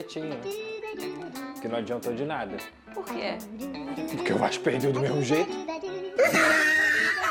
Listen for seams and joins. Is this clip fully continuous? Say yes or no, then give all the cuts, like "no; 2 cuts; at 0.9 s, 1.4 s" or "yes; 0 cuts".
yes; 0 cuts